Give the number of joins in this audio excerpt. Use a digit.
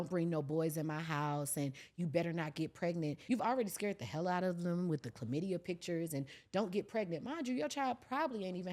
1